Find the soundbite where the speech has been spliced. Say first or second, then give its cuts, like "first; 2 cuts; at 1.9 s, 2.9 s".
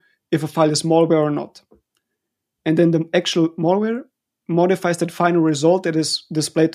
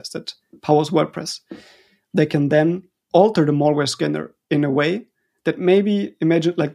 second; 1 cut; at 2.9 s